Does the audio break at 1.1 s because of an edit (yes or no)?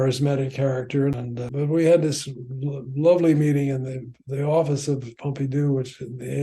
yes